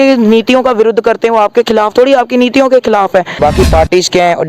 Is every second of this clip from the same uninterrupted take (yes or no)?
no